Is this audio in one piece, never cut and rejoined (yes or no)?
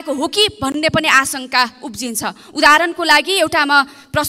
yes